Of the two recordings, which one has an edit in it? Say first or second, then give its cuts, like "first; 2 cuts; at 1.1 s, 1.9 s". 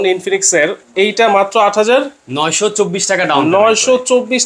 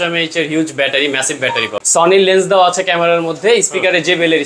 second; 1 cut; at 1.8 s